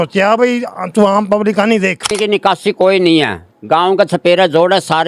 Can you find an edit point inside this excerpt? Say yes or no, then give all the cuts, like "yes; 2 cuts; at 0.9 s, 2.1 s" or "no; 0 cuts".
yes; 1 cut; at 2.1 s